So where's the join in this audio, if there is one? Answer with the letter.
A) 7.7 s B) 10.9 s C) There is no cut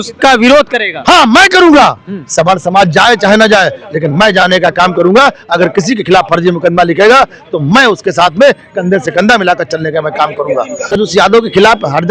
B